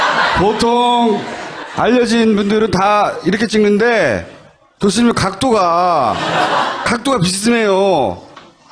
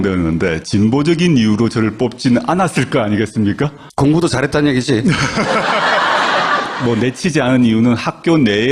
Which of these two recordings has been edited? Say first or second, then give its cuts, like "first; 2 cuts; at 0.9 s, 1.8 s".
second; 1 cut; at 5.2 s